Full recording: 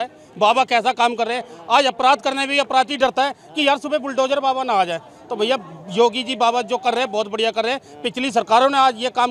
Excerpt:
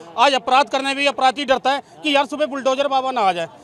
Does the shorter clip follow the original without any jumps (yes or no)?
yes